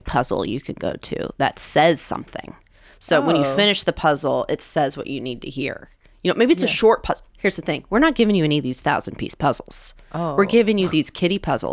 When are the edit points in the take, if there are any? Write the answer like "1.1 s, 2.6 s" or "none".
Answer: none